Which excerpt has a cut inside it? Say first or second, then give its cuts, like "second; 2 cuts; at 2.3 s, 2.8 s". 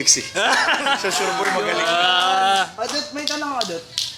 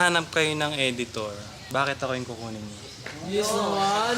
second; 1 cut; at 1.5 s